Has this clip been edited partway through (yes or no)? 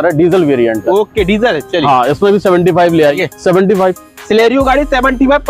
yes